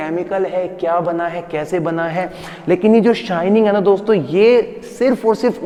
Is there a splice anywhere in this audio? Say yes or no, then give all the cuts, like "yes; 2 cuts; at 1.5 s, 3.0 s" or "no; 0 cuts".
no; 0 cuts